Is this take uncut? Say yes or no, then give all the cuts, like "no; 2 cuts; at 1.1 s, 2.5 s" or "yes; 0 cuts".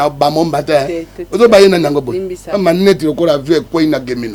yes; 0 cuts